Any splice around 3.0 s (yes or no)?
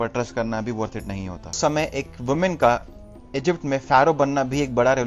no